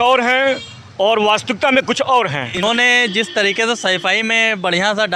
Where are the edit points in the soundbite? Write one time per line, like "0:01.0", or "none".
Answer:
0:02.6